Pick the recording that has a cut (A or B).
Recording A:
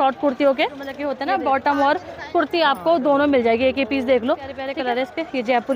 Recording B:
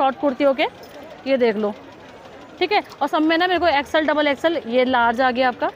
A